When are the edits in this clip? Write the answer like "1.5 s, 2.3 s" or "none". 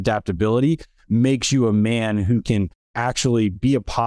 3.0 s